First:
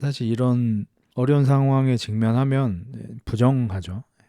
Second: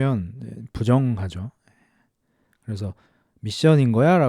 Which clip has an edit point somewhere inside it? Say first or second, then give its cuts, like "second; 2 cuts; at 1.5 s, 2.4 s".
first; 1 cut; at 1.0 s